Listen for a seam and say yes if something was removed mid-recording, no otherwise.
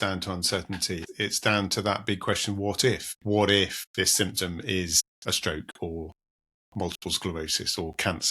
yes